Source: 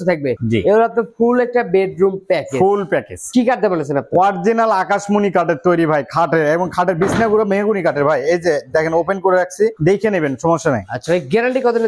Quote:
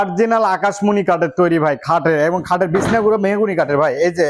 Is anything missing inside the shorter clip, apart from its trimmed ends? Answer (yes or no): no